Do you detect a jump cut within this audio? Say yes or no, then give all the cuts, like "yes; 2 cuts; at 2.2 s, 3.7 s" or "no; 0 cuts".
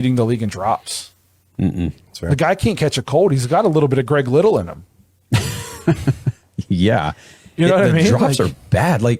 no; 0 cuts